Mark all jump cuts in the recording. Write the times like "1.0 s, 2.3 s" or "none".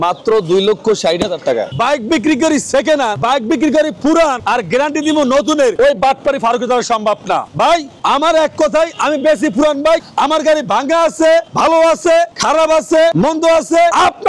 1.7 s, 3.2 s, 4.4 s, 5.7 s, 7.7 s